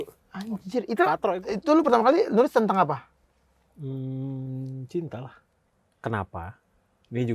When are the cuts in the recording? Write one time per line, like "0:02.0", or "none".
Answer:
0:01.2
0:05.6

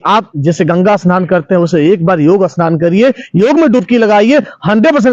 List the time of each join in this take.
none

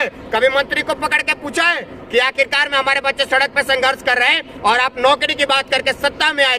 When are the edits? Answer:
none

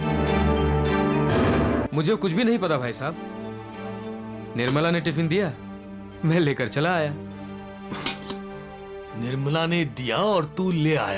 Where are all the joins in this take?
0:01.9

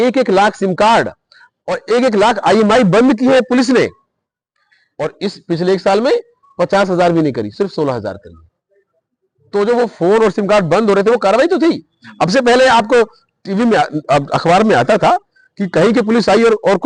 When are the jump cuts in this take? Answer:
none

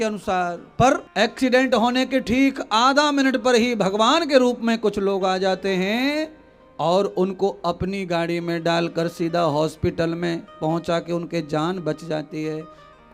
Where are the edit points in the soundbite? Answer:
0:01.1

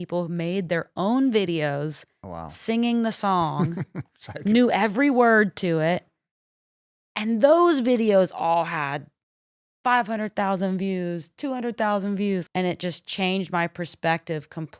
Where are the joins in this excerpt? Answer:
0:12.4

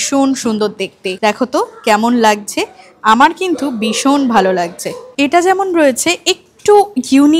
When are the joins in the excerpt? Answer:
none

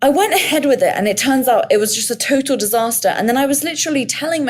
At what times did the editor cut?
none

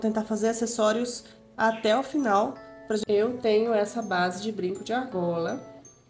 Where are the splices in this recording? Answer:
0:03.0

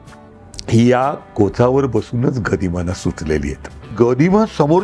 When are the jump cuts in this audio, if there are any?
0:03.9

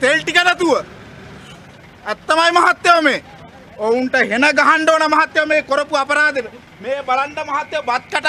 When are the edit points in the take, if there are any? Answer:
none

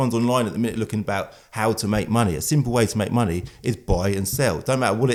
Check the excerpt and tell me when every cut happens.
none

